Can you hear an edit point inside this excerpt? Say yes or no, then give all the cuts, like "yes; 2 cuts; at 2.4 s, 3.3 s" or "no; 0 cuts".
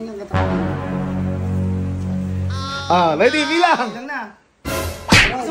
yes; 1 cut; at 4.6 s